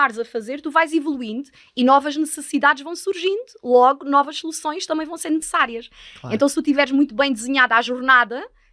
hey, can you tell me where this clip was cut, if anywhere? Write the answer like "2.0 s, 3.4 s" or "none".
5.5 s